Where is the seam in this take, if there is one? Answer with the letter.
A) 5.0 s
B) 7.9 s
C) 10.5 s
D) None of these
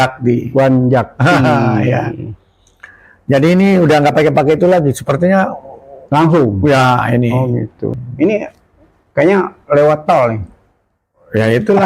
B